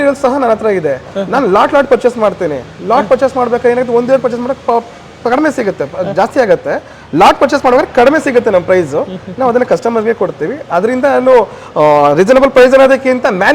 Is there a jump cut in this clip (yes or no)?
no